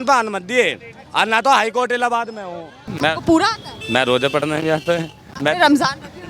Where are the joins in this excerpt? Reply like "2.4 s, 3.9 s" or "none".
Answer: 2.9 s

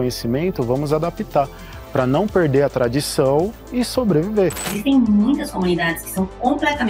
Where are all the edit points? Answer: 4.7 s

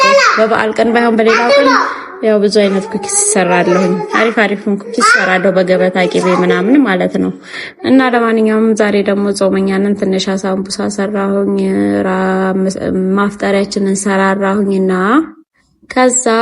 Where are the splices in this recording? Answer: none

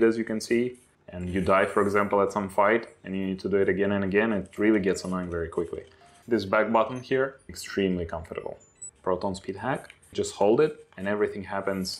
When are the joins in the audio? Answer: 7.5 s, 8.8 s, 10.1 s

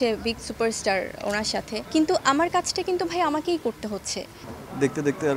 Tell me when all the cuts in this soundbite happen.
1.8 s, 4.5 s

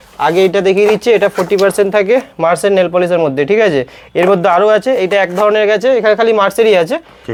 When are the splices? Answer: none

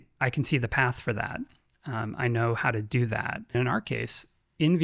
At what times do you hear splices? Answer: 3.5 s

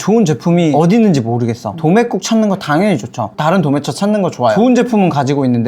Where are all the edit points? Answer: 0.7 s, 1.7 s, 4.5 s

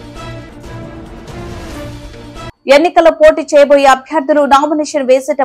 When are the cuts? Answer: 2.6 s

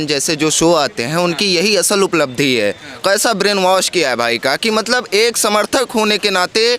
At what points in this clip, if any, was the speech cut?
none

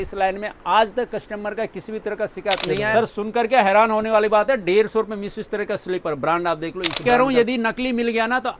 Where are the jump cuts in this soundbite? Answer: 2.8 s, 7.0 s

